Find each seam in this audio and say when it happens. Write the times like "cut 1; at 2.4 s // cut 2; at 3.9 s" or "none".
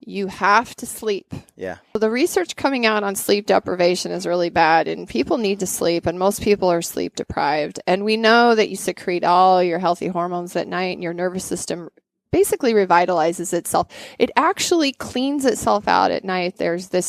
cut 1; at 2.0 s